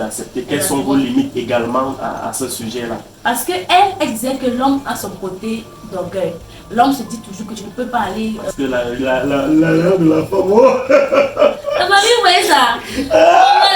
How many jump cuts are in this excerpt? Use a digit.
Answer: 1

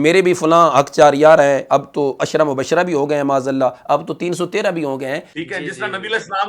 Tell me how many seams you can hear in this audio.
1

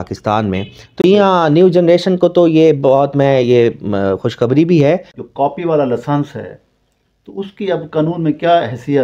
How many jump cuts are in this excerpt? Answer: 2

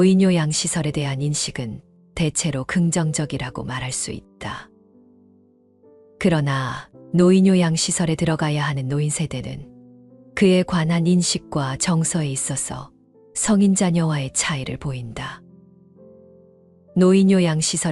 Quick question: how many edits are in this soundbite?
2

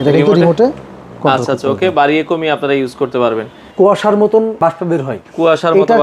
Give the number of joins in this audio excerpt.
2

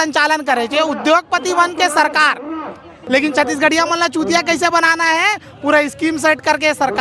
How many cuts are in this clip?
1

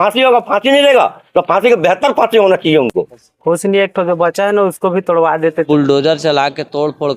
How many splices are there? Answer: 2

